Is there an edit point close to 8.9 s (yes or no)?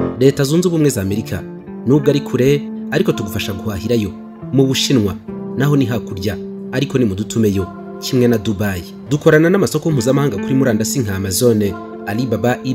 yes